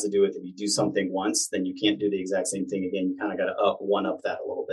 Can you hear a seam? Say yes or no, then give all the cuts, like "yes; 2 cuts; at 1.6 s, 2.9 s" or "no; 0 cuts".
no; 0 cuts